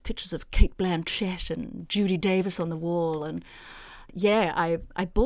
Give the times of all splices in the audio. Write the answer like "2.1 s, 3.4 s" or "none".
4.0 s